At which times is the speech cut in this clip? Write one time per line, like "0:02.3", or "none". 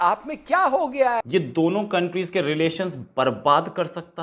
0:01.2